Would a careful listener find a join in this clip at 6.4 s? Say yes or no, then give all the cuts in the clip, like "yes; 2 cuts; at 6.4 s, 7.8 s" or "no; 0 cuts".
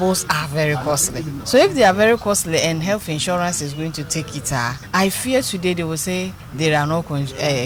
yes; 3 cuts; at 1.4 s, 4.8 s, 6.4 s